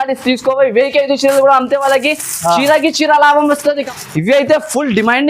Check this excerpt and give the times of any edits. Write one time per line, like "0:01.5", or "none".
0:03.9